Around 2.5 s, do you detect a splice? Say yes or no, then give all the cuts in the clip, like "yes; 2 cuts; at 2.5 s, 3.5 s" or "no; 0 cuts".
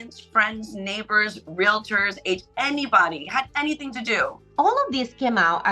no; 1 cut; at 4.4 s